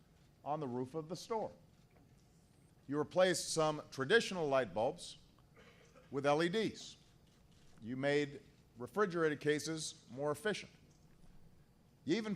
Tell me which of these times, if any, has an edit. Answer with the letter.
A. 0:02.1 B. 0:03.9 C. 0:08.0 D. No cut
B